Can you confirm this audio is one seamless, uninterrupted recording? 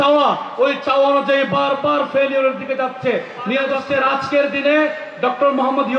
no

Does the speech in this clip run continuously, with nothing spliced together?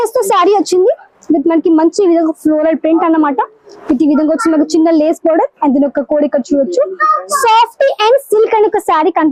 yes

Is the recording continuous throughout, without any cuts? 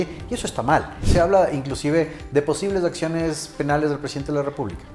no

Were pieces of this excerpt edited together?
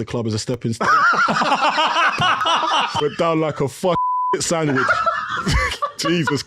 yes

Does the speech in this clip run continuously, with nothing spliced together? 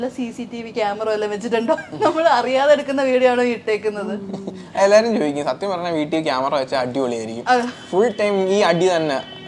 yes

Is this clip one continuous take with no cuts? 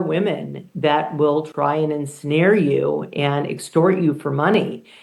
yes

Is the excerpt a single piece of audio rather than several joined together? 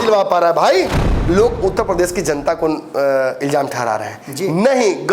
no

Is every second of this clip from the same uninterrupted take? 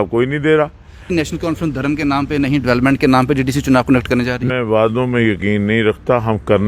no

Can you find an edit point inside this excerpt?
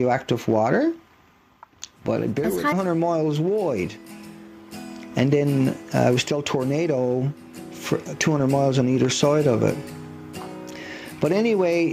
no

